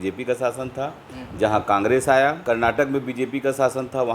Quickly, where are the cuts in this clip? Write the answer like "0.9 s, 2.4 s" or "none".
2.4 s